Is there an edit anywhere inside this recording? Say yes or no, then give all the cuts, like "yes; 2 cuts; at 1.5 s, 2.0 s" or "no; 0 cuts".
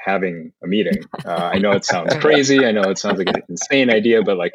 no; 0 cuts